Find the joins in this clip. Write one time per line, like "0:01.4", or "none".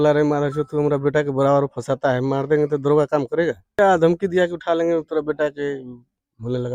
0:03.8